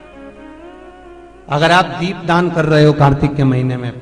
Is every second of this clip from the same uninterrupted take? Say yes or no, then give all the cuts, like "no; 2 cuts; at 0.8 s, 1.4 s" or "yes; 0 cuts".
yes; 0 cuts